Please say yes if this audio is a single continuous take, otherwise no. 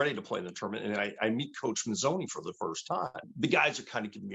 no